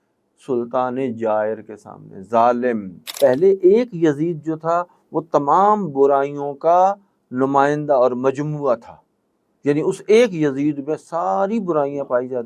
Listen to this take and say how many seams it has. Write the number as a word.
one